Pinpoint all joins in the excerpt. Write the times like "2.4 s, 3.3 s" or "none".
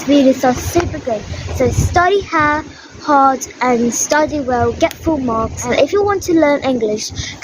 5.7 s

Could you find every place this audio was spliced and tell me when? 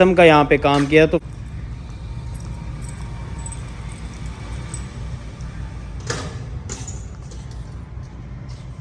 none

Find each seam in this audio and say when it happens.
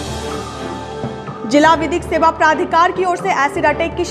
1.2 s

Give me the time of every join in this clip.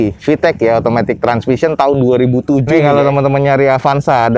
2.7 s

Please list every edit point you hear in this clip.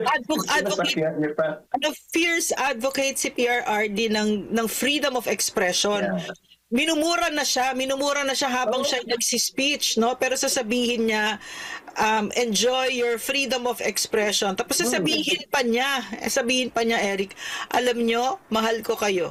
none

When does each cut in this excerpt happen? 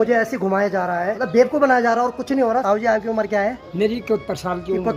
1.1 s, 2.6 s, 3.6 s

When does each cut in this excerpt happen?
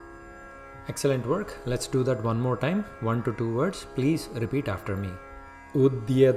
none

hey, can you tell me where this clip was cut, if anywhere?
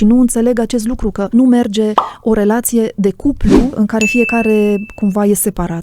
1.2 s, 3.7 s

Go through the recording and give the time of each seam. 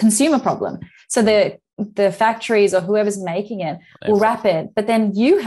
none

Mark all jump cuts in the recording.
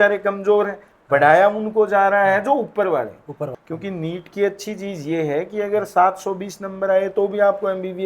3.4 s

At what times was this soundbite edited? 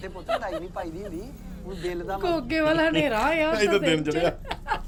none

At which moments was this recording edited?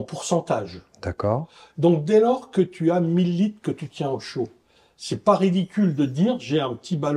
none

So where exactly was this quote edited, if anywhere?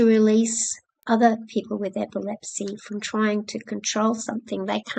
1.0 s

